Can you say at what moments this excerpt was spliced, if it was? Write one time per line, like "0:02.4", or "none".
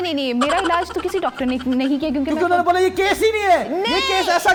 none